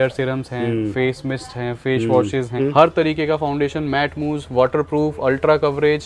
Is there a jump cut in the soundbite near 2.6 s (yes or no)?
yes